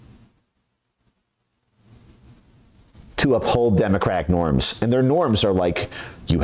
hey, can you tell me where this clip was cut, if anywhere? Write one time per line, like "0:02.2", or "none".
none